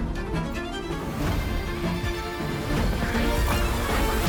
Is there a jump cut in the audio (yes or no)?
no